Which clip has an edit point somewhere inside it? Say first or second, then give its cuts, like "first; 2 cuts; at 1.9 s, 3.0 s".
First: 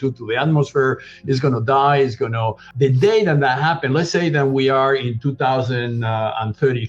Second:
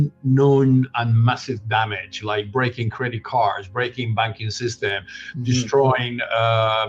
first; 1 cut; at 2.6 s